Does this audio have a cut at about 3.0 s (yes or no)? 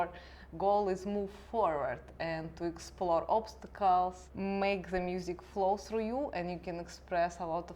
no